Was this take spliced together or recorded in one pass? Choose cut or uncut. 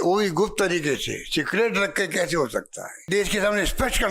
cut